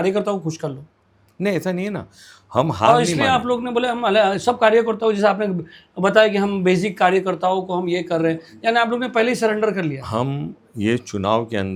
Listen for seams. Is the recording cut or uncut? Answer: uncut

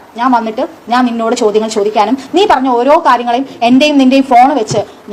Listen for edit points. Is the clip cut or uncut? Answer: uncut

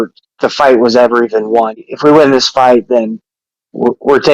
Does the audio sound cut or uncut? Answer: cut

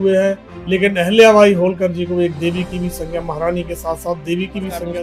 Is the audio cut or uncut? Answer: uncut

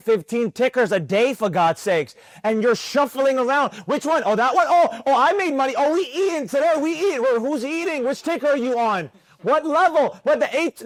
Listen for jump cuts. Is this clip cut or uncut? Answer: uncut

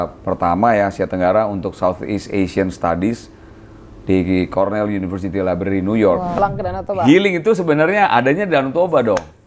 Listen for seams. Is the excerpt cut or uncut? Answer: cut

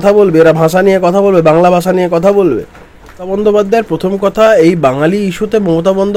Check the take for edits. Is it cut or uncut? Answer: cut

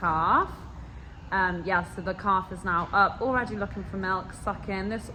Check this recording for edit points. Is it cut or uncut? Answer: uncut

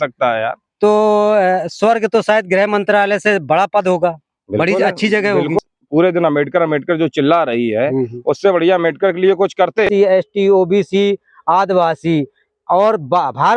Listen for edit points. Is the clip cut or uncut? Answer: cut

